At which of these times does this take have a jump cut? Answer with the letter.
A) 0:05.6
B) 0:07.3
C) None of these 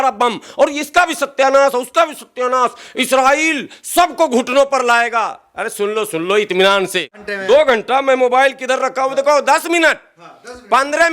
B